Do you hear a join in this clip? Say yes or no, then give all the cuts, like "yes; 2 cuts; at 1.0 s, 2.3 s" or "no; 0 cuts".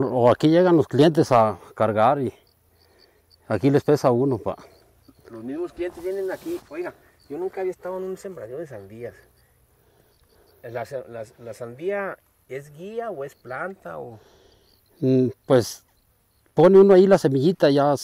no; 0 cuts